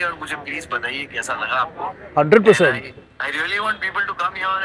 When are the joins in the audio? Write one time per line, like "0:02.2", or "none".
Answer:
none